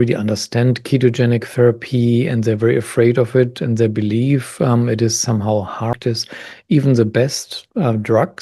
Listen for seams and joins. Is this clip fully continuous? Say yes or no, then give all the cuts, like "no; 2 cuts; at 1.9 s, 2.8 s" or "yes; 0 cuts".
no; 1 cut; at 5.9 s